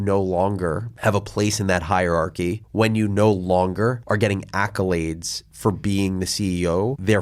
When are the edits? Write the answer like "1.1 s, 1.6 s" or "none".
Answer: none